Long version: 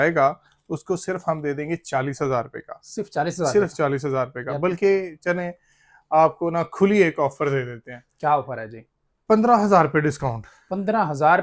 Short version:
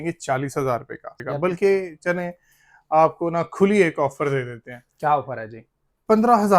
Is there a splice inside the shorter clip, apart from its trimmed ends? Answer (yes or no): yes